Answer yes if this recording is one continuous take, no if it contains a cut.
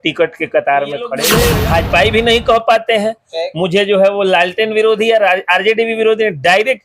no